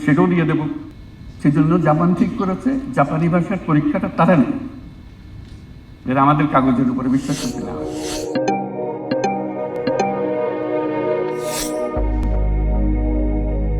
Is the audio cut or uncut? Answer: uncut